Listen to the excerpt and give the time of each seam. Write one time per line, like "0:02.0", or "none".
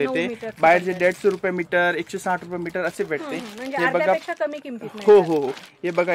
none